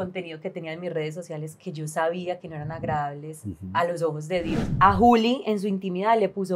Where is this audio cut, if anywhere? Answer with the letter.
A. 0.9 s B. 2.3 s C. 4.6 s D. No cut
C